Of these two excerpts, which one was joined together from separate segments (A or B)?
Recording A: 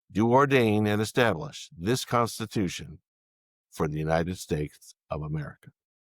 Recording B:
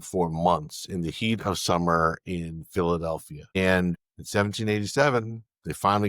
B